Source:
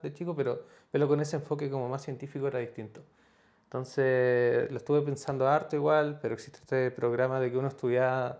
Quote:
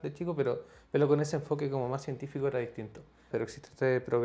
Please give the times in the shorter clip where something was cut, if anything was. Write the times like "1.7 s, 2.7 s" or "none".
3.3 s